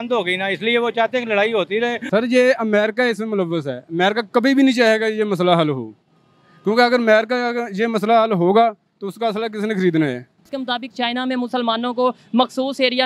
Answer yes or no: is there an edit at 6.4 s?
no